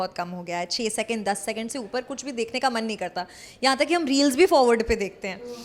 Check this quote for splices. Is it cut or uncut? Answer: uncut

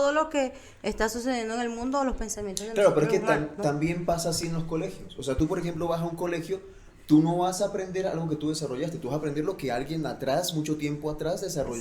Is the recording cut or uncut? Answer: uncut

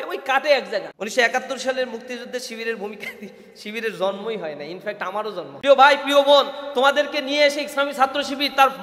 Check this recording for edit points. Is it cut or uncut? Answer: cut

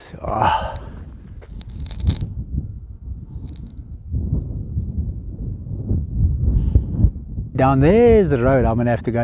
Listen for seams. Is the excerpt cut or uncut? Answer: cut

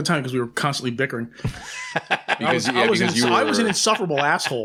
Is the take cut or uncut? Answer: uncut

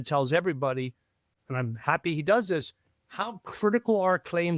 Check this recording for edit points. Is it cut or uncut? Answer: cut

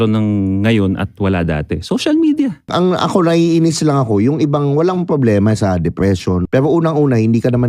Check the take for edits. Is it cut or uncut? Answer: cut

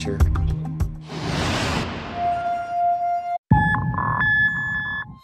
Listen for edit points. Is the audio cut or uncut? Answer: uncut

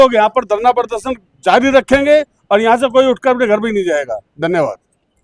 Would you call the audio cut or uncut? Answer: uncut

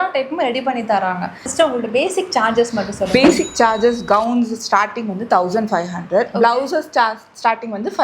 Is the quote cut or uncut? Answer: cut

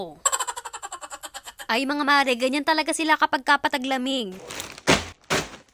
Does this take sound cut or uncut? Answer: uncut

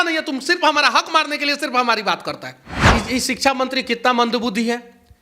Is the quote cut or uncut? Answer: cut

